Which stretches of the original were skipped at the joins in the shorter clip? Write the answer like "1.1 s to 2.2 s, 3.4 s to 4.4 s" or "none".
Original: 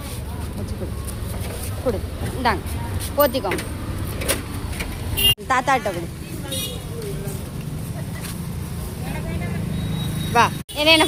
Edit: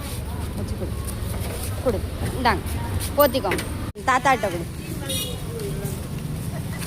3.9 s to 5.3 s

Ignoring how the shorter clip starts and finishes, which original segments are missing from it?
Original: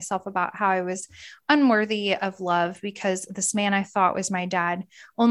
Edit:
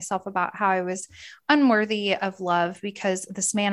none

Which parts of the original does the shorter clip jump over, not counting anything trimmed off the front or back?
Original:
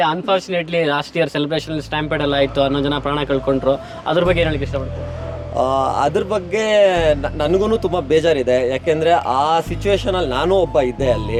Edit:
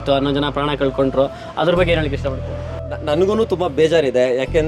5.4 s to 7.3 s

